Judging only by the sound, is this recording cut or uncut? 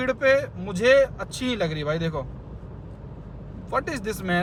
uncut